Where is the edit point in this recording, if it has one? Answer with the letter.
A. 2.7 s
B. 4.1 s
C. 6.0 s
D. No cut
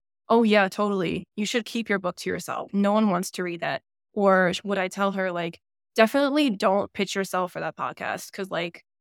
A